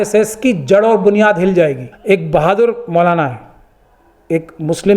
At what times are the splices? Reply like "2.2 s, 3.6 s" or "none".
1.9 s